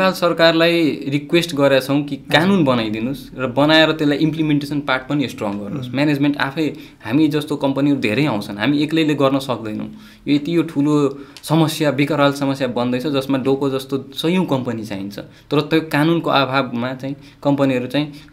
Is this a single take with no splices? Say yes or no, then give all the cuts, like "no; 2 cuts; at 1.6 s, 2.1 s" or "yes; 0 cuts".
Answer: yes; 0 cuts